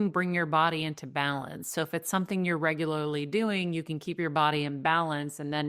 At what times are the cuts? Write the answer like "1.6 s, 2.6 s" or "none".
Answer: none